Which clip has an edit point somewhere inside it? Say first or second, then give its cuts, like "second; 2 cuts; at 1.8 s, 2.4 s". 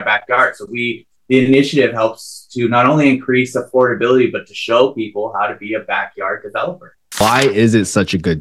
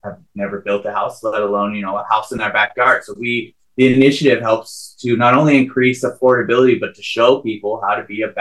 first; 1 cut; at 7.2 s